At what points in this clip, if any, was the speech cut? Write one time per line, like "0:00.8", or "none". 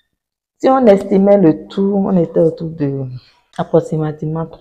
0:03.7